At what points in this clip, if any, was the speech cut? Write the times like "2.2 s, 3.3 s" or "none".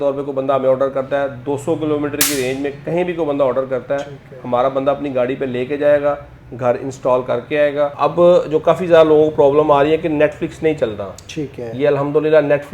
7.9 s